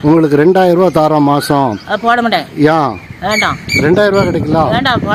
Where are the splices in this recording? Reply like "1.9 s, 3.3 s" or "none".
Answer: none